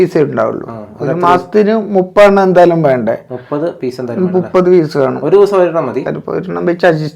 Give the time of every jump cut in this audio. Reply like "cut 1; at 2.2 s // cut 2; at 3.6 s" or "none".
cut 1; at 6.0 s